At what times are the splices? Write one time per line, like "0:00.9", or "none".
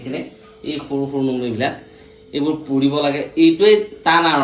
none